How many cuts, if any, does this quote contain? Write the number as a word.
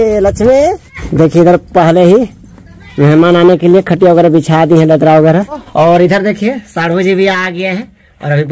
two